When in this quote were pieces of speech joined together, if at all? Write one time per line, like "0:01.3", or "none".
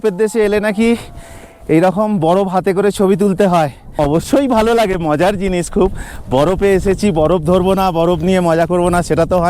0:04.0